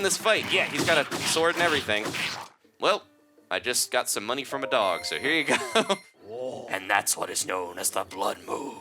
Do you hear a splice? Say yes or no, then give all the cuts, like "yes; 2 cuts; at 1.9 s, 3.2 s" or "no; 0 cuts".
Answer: yes; 2 cuts; at 2.5 s, 6.2 s